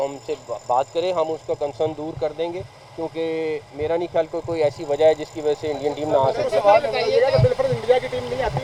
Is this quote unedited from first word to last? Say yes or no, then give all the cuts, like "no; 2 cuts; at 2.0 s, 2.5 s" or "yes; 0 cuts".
yes; 0 cuts